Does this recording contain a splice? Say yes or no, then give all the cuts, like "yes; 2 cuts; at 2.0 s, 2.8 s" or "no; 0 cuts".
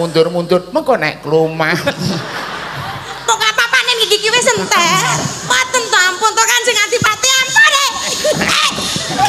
yes; 1 cut; at 5.4 s